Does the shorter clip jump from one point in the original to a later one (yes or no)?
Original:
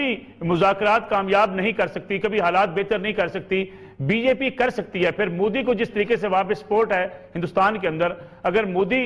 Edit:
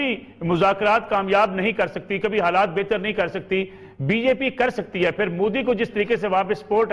no